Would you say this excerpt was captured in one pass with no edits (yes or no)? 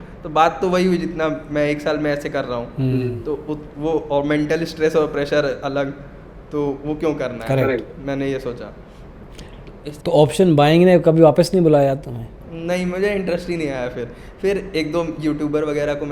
yes